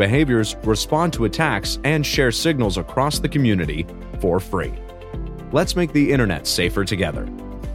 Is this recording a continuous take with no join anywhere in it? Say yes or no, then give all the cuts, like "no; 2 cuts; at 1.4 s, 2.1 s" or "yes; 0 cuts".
yes; 0 cuts